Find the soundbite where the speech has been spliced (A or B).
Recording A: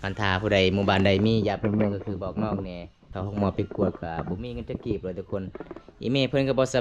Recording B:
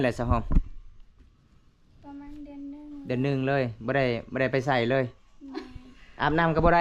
A